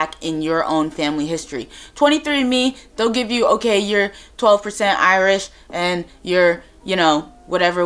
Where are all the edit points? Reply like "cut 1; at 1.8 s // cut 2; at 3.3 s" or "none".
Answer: none